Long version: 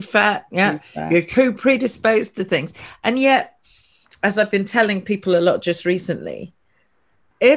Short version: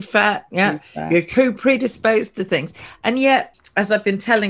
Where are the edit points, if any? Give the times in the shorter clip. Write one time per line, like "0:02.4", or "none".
0:03.6